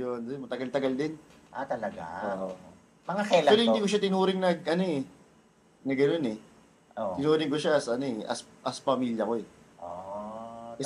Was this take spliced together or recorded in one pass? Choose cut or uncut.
uncut